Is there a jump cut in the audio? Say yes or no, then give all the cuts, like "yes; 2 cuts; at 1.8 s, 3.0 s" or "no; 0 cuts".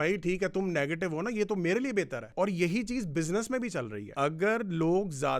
yes; 2 cuts; at 2.3 s, 4.0 s